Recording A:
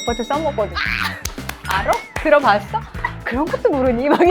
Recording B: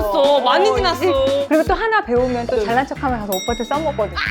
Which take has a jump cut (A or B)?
B